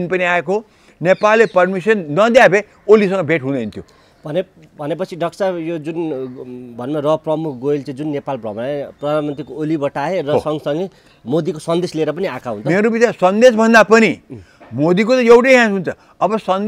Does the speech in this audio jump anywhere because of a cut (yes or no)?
no